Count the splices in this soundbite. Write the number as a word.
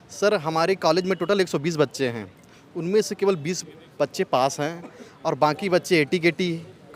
zero